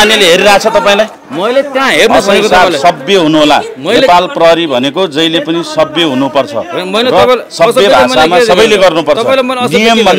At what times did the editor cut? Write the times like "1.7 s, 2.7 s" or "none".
none